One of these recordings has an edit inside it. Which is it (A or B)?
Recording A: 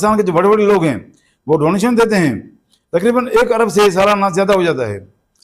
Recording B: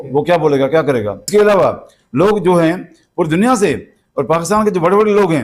B